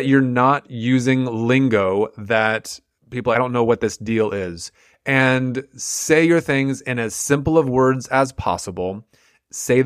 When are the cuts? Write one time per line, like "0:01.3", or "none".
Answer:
0:03.4